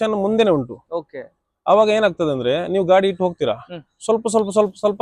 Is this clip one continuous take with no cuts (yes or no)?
yes